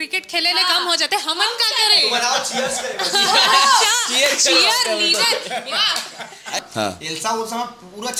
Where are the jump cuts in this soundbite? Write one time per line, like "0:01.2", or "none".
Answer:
0:06.6